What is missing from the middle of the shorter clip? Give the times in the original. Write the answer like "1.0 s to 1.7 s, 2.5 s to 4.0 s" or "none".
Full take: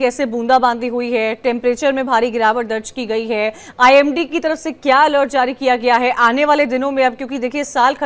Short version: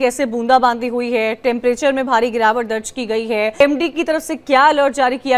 3.6 s to 4.0 s